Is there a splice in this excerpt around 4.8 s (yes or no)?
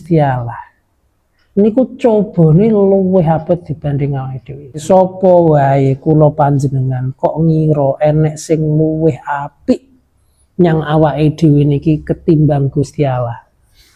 yes